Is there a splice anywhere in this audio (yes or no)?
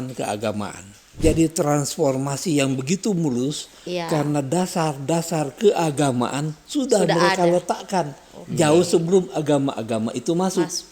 yes